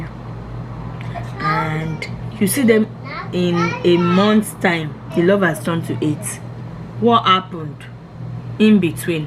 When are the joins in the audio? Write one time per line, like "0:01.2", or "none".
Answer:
0:05.0